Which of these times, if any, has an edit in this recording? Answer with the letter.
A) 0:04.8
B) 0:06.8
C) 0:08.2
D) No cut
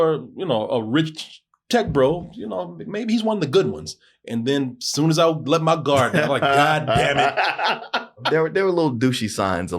C